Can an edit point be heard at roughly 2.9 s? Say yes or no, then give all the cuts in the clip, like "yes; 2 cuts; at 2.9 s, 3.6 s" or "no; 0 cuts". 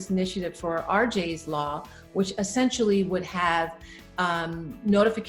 no; 0 cuts